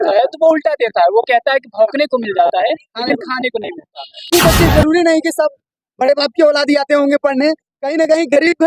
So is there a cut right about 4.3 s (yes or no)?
yes